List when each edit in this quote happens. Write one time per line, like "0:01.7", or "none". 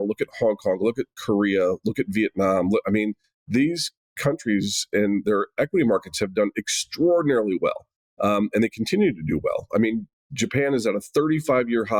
none